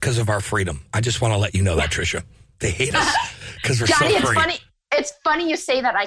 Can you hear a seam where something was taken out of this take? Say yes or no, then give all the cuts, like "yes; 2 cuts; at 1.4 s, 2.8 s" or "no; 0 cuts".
no; 0 cuts